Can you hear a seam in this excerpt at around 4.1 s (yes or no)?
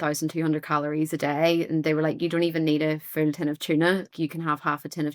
yes